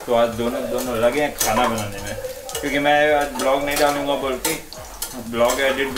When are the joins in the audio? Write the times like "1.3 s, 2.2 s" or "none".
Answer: none